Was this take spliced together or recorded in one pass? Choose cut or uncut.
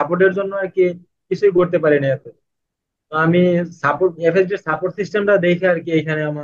uncut